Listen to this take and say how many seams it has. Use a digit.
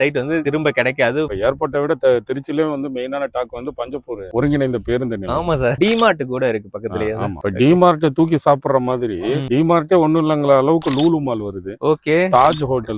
4